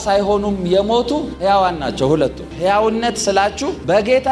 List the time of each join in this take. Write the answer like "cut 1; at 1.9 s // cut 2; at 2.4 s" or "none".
cut 1; at 2.5 s